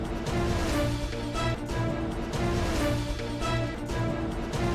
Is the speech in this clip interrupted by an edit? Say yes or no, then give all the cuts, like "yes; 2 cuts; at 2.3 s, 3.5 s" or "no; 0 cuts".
no; 0 cuts